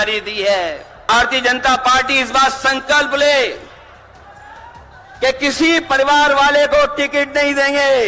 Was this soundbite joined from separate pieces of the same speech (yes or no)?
yes